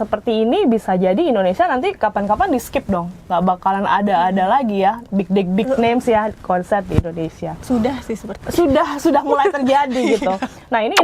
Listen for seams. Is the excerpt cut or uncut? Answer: uncut